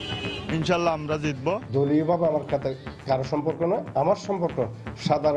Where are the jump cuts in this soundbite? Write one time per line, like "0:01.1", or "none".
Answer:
0:01.6